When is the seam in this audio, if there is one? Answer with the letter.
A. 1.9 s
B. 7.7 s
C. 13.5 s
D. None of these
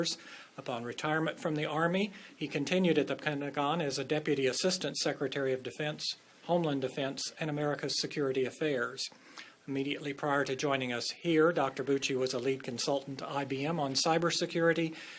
B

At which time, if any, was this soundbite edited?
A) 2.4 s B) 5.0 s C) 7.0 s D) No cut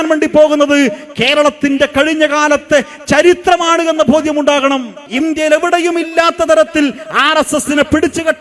B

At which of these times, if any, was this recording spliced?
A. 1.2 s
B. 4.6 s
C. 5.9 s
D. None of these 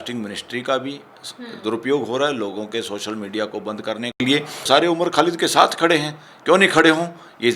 B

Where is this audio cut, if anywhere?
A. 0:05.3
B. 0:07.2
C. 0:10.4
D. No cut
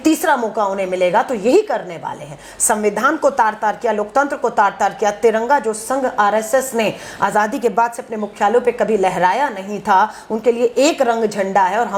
D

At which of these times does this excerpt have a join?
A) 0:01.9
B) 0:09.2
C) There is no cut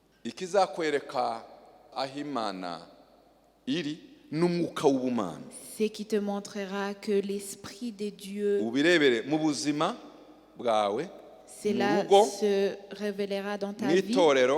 A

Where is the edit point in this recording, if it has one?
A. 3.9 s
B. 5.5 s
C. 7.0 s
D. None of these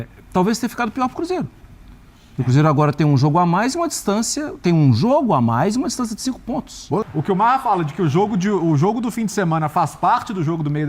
C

